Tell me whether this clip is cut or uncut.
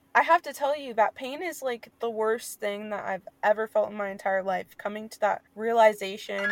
cut